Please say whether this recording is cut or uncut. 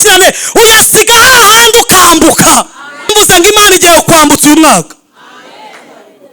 cut